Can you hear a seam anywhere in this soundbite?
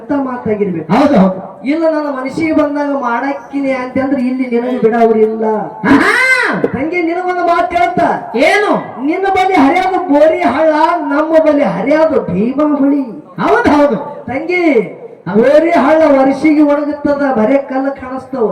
no; 0 cuts

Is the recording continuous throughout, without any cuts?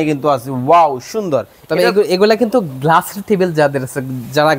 yes; 0 cuts

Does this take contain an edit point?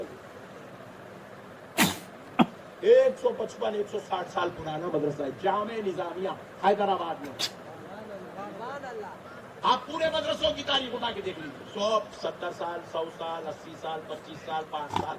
no; 0 cuts

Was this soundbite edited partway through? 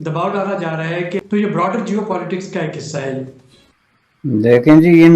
yes; 1 cut; at 1.2 s

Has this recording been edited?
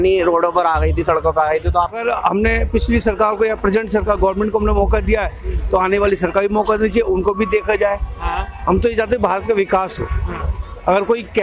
yes; 1 cut; at 2.0 s

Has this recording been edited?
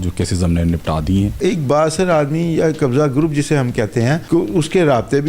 yes; 2 cuts; at 1.4 s, 4.2 s

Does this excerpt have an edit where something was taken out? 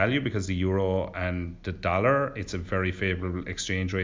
no; 0 cuts

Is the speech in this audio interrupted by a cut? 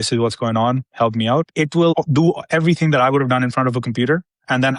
no; 0 cuts

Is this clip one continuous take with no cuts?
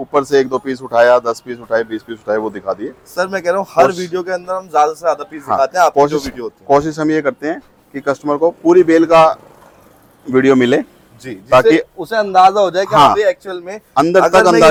yes; 0 cuts

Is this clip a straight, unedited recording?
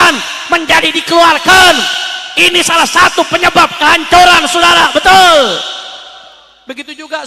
yes; 0 cuts

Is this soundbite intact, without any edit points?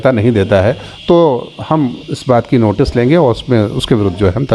yes; 0 cuts

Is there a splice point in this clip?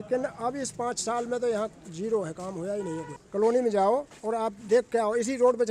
yes; 1 cut; at 3.2 s

